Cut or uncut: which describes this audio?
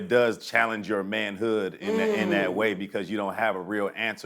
uncut